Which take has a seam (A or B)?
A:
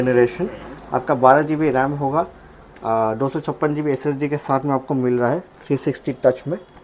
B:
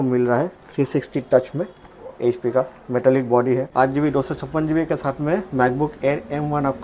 B